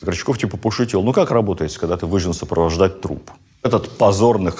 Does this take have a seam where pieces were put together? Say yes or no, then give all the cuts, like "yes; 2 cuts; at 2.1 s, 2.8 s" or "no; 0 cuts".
yes; 1 cut; at 3.7 s